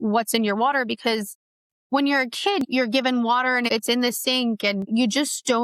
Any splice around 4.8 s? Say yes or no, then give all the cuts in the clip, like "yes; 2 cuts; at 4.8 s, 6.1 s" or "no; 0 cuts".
yes; 3 cuts; at 2.6 s, 3.7 s, 4.8 s